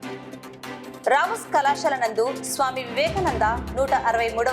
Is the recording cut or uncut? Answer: cut